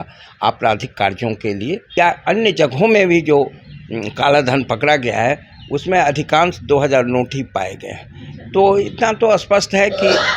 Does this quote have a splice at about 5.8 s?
no; 1 cut; at 2.0 s

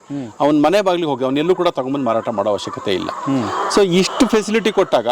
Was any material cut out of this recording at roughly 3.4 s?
no; 0 cuts

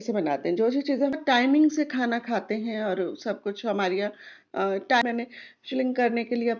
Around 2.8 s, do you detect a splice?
no; 2 cuts; at 1.2 s, 5.0 s

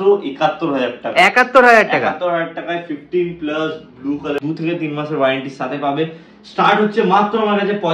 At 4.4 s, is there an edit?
yes; 1 cut; at 4.4 s

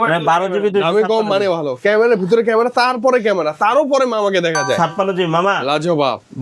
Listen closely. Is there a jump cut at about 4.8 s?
yes; 1 cut; at 4.8 s

